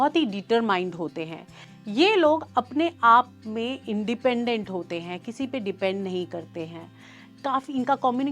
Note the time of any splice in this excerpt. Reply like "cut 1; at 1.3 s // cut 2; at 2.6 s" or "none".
none